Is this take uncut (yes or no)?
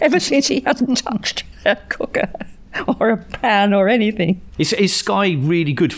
yes